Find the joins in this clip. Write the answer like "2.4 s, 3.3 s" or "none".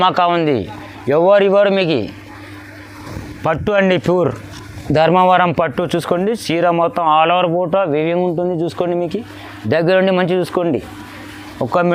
none